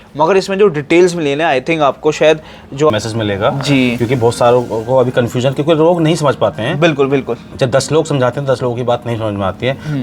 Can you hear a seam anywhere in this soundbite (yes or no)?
yes